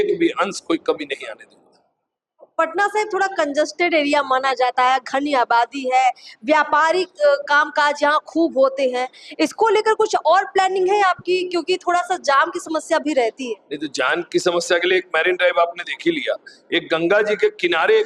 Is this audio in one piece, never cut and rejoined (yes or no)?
yes